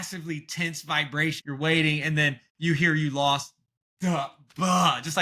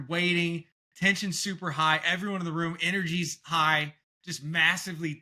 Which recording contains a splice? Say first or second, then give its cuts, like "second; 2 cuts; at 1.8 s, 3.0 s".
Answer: first; 1 cut; at 1.4 s